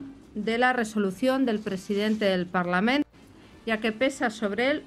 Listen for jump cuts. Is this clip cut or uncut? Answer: cut